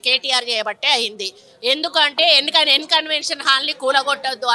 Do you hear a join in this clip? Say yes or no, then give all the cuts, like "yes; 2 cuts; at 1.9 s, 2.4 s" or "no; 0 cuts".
no; 0 cuts